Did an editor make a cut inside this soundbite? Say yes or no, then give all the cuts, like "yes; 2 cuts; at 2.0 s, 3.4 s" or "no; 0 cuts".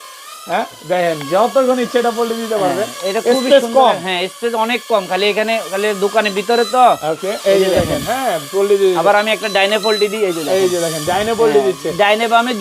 no; 0 cuts